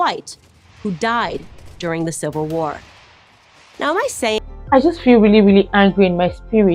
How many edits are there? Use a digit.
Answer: 1